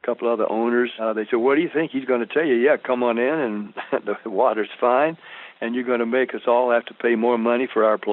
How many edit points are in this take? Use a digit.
1